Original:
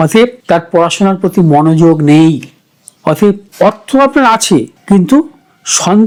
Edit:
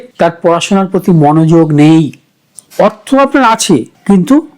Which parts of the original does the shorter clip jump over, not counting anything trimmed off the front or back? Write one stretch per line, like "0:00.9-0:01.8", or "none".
0:02.9-0:03.4

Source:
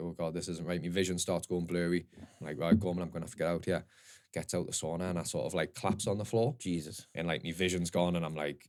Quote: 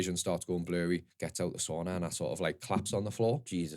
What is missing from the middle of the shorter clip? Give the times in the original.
0:02.2-0:04.3

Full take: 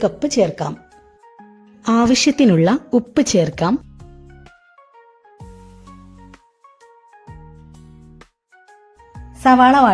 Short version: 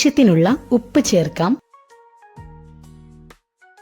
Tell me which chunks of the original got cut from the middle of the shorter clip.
0:03.9-0:06.6

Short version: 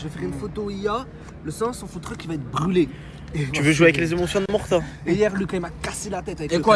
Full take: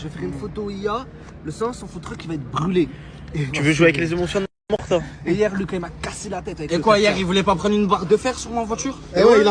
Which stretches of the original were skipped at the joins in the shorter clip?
0:04.6-0:04.8

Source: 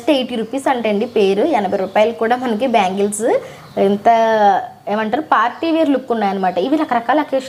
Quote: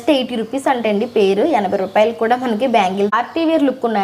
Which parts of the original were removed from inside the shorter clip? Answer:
0:03.1-0:05.4

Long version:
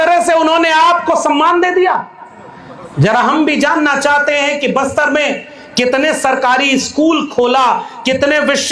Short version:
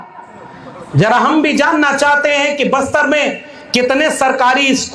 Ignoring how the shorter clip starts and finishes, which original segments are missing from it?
none

